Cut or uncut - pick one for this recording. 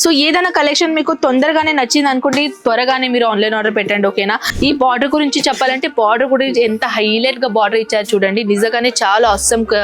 cut